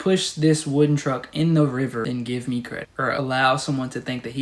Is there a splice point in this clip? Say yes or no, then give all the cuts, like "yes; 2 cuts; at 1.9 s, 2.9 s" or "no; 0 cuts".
yes; 2 cuts; at 2.1 s, 3.1 s